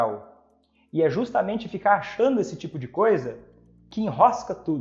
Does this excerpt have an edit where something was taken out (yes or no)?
no